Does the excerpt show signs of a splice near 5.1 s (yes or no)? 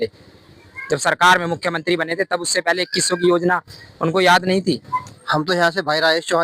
yes